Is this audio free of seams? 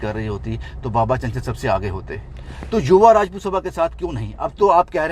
yes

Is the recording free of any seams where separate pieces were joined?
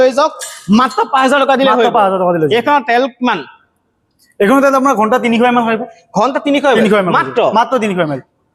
yes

